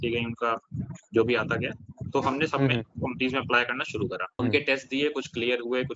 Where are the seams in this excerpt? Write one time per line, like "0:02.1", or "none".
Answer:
0:04.4